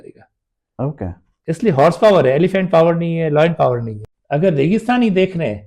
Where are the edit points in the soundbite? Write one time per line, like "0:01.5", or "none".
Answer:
0:03.9